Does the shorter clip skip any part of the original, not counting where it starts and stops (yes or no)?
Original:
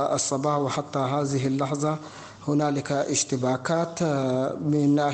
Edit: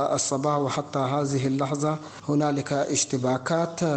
yes